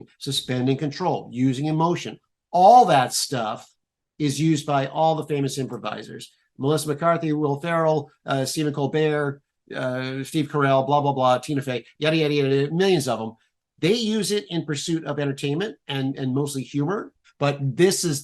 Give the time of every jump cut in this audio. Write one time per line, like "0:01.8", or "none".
0:17.2